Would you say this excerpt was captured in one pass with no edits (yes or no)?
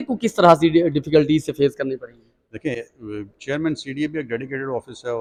yes